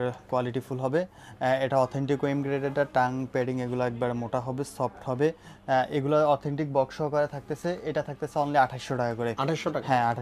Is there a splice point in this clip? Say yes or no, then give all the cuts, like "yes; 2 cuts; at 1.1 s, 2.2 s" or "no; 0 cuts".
no; 0 cuts